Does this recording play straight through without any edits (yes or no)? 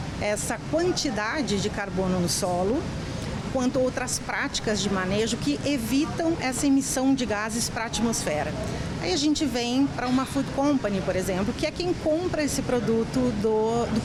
yes